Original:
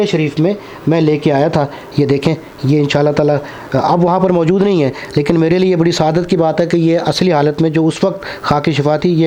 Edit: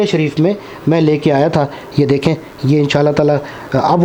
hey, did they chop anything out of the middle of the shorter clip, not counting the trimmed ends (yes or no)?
no